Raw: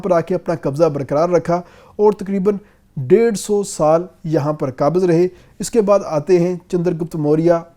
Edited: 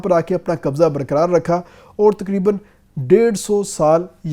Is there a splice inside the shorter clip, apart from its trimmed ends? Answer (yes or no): no